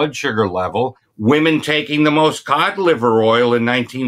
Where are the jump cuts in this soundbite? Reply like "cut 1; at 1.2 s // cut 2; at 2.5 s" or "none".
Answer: cut 1; at 1.0 s